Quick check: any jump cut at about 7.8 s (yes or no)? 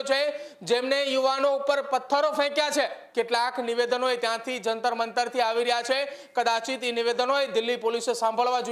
no